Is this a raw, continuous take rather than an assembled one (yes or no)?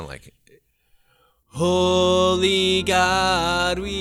no